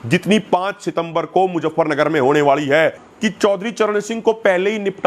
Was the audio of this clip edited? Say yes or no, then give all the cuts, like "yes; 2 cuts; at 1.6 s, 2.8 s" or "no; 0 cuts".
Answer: yes; 1 cut; at 3.1 s